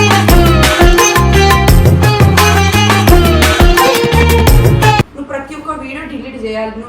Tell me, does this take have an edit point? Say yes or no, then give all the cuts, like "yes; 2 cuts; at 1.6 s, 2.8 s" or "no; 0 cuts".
yes; 1 cut; at 5.2 s